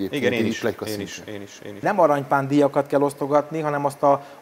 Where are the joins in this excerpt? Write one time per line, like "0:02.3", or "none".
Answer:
0:01.8